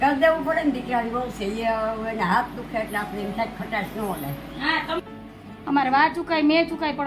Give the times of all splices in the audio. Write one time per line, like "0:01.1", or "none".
0:05.0